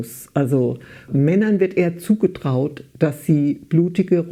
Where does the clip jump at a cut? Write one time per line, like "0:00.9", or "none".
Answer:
none